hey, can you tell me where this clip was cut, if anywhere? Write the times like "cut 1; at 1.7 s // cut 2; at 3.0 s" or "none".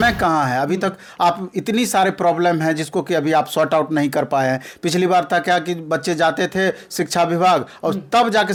none